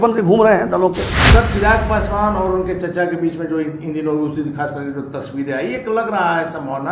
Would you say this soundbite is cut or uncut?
cut